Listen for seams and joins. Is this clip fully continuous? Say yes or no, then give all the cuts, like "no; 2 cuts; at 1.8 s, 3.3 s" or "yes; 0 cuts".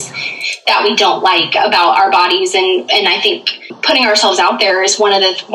no; 1 cut; at 3.8 s